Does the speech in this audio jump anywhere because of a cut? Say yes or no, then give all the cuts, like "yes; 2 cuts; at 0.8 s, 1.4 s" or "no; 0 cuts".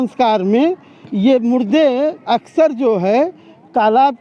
no; 0 cuts